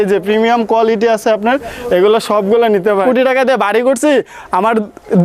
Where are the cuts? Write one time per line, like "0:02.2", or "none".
0:03.0